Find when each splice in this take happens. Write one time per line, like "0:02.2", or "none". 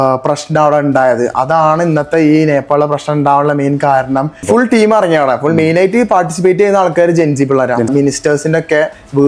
0:04.4
0:07.9